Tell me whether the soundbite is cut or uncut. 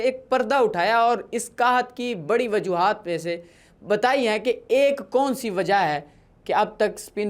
uncut